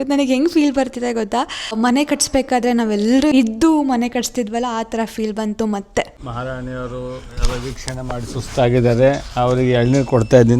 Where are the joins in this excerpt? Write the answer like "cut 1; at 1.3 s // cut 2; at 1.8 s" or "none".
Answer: cut 1; at 1.7 s // cut 2; at 3.3 s // cut 3; at 6.2 s